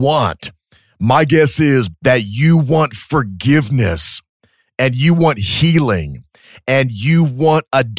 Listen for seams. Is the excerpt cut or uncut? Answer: cut